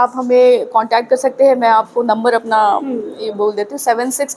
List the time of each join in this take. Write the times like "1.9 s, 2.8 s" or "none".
none